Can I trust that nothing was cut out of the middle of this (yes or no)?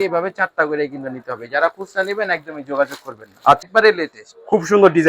no